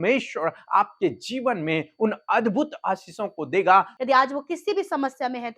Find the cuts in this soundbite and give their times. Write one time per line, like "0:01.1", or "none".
0:03.9